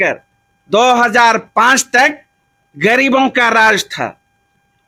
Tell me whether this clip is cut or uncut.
uncut